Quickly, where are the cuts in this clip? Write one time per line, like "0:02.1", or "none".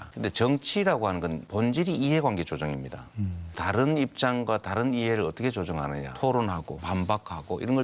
0:03.6
0:06.1
0:06.7